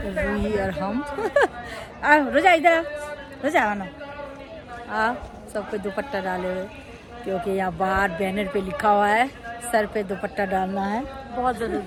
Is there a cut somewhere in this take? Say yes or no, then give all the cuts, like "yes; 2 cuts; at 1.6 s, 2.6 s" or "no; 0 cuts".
no; 0 cuts